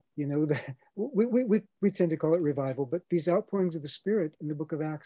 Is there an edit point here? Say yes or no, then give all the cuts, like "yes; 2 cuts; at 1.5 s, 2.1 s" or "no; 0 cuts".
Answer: no; 0 cuts